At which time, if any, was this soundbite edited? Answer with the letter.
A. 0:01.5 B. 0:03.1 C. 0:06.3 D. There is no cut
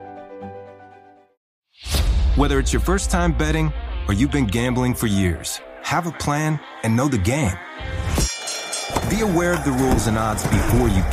A